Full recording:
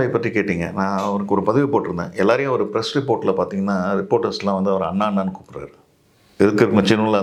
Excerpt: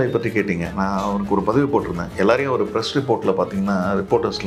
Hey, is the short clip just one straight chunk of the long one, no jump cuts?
yes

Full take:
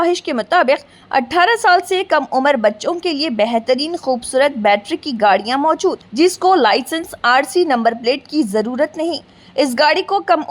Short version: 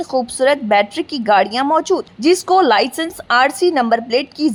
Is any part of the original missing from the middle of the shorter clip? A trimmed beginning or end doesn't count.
no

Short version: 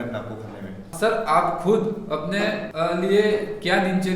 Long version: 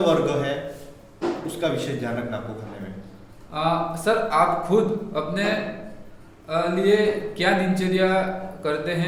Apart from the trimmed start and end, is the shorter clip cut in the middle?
yes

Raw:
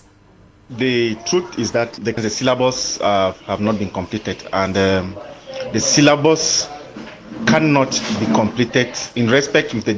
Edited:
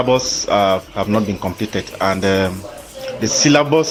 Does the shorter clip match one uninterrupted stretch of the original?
yes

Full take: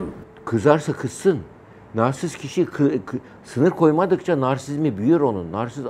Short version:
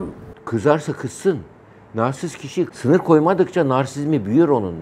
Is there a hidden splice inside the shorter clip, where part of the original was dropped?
yes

